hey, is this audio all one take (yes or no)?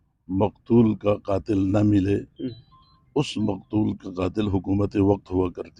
yes